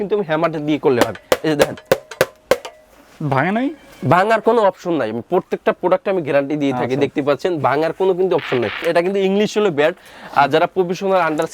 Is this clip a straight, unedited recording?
no; 1 cut; at 8.8 s

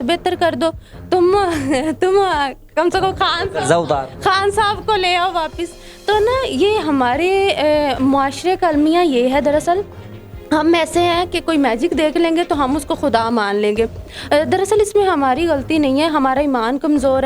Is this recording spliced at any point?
no; 0 cuts

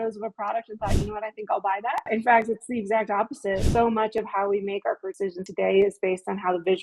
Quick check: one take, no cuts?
no; 3 cuts; at 2.1 s, 3.6 s, 5.3 s

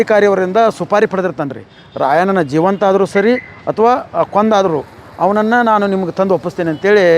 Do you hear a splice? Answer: no; 0 cuts

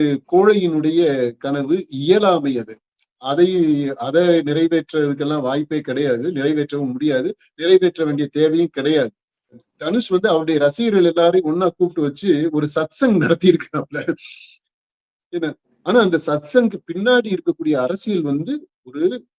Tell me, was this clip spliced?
yes; 1 cut; at 9.7 s

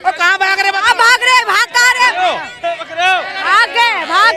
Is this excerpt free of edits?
yes; 0 cuts

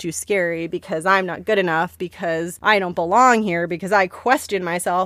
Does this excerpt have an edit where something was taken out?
yes; 1 cut; at 2.2 s

